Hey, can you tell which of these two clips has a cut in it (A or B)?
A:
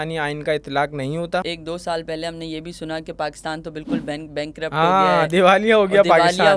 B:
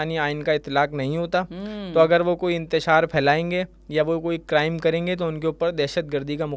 A